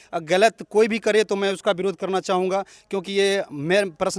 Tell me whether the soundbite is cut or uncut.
uncut